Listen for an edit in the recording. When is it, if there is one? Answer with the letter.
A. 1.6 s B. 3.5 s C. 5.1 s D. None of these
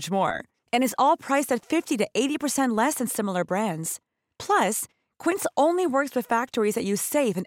D